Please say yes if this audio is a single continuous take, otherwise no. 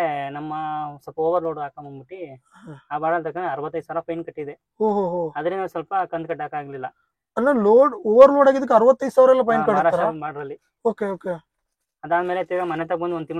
yes